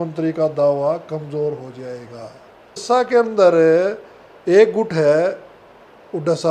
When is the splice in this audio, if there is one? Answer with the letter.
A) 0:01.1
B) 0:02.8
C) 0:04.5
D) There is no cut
B